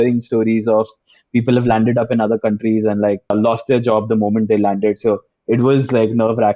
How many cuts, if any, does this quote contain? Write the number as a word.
one